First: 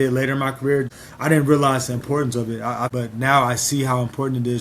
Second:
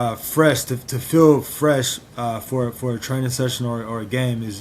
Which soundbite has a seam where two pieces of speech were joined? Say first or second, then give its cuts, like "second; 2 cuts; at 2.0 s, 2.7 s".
first; 2 cuts; at 1.0 s, 2.9 s